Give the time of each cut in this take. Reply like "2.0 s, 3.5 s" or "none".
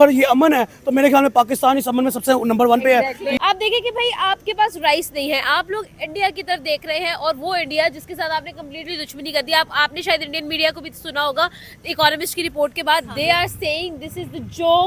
3.4 s